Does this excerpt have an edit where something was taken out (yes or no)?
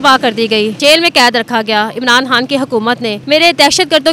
yes